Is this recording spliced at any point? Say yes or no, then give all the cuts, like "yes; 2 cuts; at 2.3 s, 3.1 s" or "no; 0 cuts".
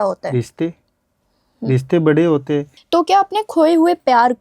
yes; 1 cut; at 2.7 s